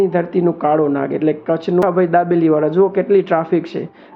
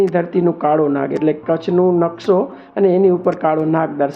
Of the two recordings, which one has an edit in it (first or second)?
first